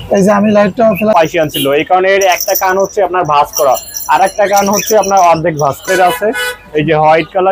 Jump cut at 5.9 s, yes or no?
yes